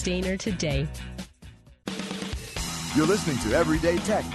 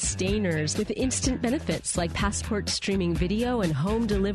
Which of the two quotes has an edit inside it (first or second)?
first